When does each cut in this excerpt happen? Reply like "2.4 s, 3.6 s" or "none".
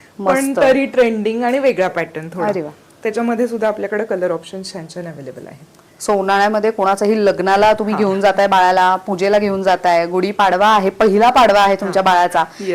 none